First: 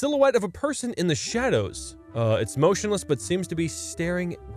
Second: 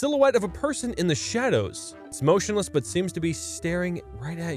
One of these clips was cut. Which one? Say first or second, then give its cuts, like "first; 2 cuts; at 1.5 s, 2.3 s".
second; 1 cut; at 2.1 s